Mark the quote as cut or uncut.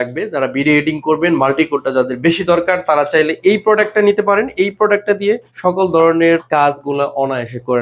cut